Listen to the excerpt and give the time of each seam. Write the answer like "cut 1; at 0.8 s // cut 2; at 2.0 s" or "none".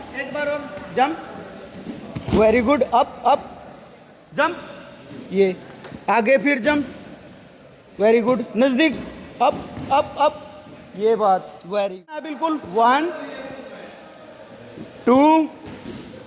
cut 1; at 12.3 s